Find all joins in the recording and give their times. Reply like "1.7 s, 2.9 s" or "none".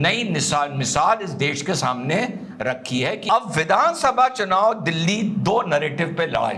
3.2 s